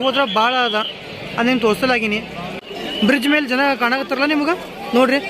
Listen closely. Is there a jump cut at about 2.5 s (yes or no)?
yes